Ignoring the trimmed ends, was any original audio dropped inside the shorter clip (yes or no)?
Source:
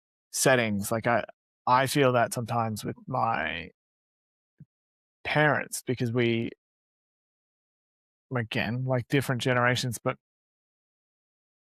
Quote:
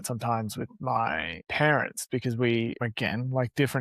yes